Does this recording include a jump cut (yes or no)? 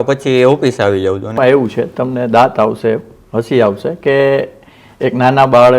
yes